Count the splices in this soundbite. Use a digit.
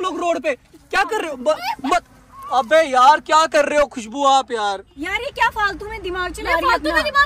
1